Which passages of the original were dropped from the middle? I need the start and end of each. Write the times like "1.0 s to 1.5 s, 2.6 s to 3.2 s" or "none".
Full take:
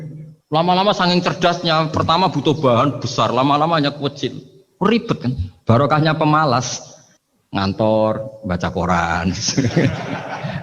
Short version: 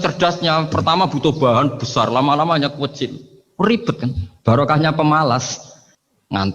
none